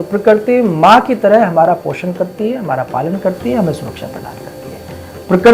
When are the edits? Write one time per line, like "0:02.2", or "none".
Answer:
none